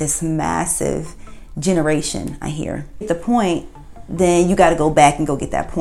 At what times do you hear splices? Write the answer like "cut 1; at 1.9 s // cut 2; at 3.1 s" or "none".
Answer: cut 1; at 3.1 s